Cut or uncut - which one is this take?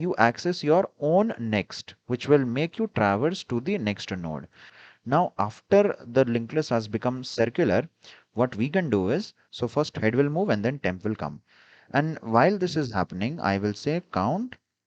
cut